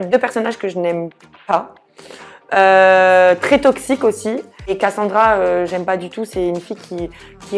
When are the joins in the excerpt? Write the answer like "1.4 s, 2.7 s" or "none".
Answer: 4.8 s